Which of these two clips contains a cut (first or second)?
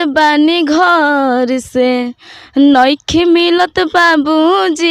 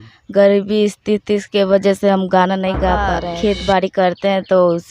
second